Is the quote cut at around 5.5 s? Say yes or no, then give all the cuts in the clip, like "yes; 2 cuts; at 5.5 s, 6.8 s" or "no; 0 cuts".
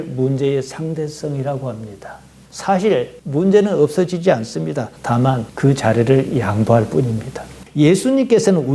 no; 2 cuts; at 2.4 s, 7.6 s